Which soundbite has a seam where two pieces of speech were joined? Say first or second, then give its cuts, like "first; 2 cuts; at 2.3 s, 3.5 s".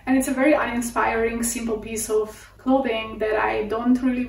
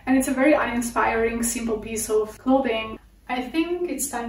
second; 1 cut; at 2.6 s